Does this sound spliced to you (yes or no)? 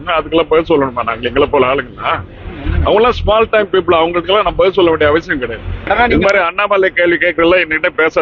yes